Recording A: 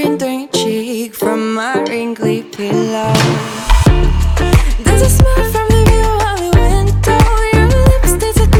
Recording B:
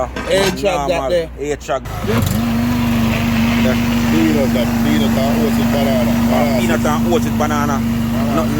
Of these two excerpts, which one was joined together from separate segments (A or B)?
B